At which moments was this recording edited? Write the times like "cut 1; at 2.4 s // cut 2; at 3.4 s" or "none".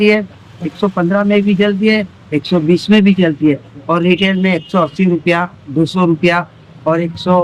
none